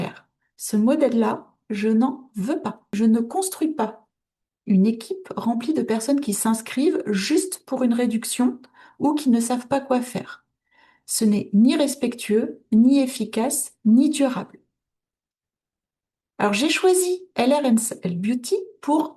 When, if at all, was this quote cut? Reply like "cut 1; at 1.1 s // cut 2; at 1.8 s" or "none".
cut 1; at 2.9 s